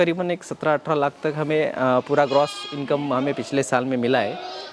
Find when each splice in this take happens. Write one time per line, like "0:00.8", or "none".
none